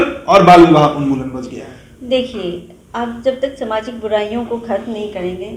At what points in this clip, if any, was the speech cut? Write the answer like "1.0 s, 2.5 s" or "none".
none